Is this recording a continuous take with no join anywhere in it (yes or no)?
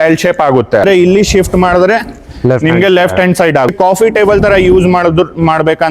no